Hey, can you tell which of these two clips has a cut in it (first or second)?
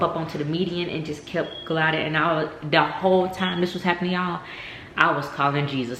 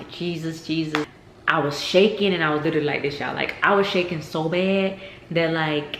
second